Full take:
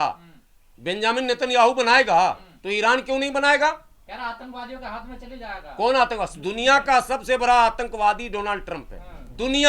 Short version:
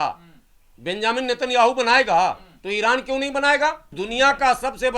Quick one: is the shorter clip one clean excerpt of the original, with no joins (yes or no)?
no